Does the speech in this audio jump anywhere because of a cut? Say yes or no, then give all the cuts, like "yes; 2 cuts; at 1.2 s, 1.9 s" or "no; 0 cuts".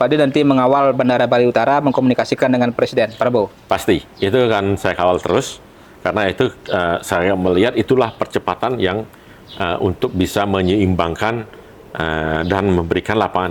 no; 0 cuts